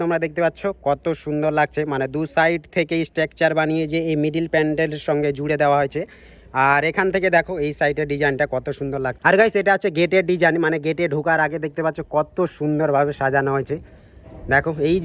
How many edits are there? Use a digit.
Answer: 0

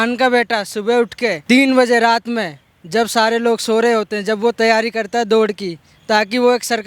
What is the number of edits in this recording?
1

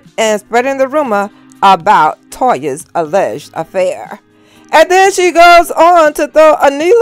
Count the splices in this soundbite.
0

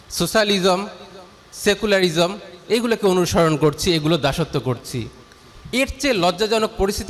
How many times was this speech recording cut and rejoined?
0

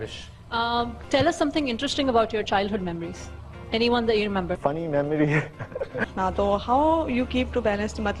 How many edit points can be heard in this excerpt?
1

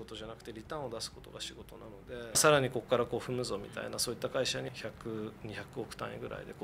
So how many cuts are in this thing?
2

